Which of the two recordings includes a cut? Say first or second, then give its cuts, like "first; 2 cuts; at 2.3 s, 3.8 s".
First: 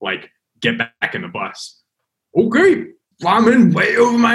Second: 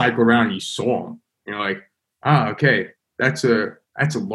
first; 2 cuts; at 1.8 s, 3.1 s